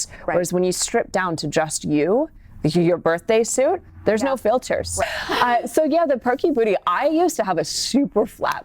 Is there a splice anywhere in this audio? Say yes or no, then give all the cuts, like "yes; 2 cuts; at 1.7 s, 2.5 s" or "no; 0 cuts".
yes; 1 cut; at 5.0 s